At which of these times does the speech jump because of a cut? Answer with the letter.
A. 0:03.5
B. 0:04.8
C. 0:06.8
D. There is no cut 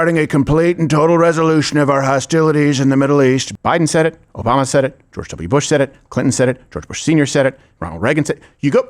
A